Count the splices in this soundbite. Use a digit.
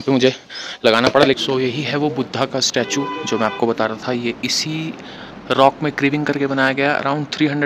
1